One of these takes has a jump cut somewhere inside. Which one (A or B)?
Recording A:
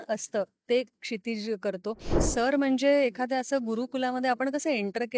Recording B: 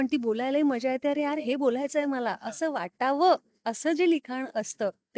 A